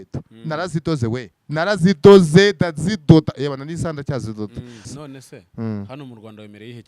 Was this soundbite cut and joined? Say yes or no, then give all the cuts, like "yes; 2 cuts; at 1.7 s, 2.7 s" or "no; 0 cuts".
yes; 1 cut; at 4.9 s